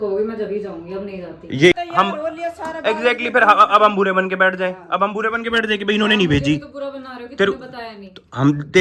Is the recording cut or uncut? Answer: cut